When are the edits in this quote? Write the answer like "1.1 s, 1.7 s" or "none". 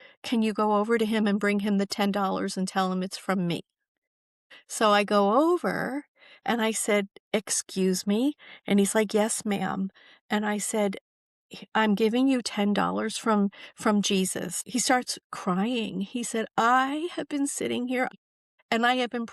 14.6 s, 18.1 s

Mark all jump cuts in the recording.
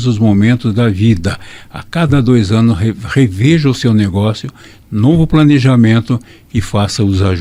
none

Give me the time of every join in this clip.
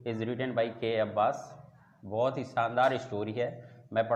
none

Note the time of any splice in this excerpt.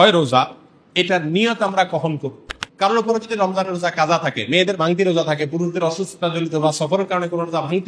2.5 s

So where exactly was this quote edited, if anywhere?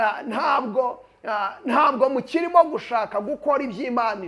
none

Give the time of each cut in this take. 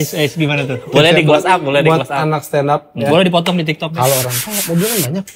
3.9 s

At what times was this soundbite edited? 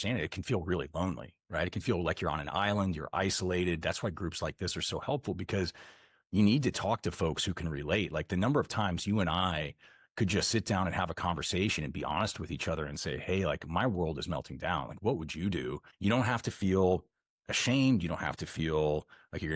15.8 s

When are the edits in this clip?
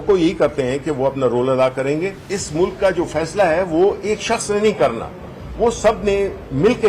2.3 s

